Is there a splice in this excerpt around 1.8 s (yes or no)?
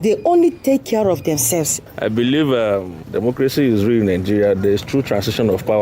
yes